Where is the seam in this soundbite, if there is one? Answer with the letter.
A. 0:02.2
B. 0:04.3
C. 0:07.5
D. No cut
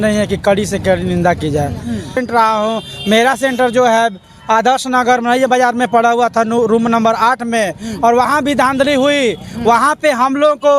A